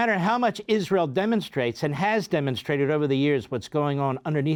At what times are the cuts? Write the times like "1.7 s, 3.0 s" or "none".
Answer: none